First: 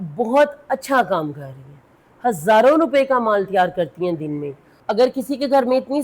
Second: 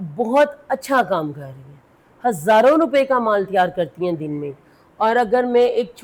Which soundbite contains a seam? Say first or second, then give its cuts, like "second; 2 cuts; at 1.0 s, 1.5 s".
first; 1 cut; at 4.7 s